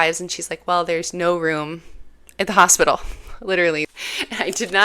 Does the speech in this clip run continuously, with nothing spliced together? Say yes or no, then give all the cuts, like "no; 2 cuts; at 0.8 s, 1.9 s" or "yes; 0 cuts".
no; 1 cut; at 3.9 s